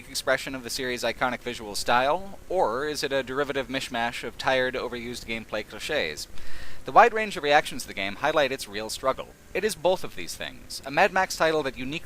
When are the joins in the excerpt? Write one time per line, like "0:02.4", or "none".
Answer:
0:10.0

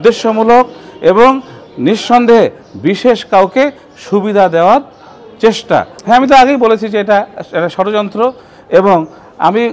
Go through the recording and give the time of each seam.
0:05.9

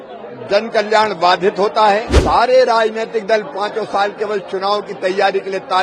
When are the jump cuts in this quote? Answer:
0:02.1

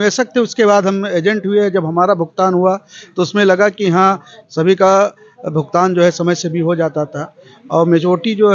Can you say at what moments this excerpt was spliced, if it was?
none

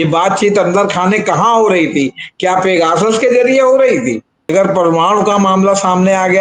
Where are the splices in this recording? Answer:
0:04.4

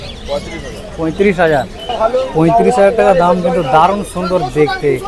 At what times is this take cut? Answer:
0:01.8

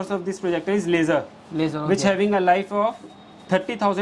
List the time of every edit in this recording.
none

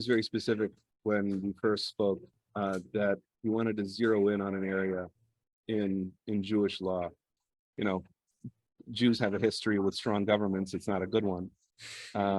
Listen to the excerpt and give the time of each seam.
0:07.3
0:11.5

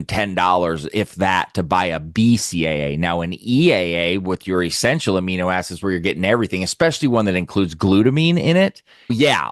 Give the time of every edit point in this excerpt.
none

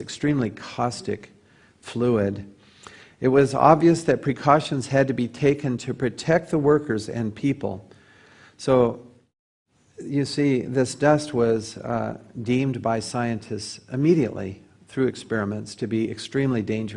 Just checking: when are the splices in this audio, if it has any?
none

